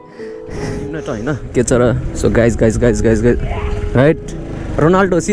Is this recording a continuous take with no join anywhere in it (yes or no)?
no